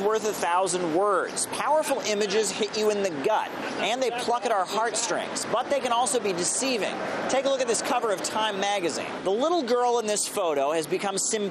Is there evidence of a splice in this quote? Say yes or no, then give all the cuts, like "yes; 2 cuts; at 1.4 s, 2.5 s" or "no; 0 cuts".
no; 0 cuts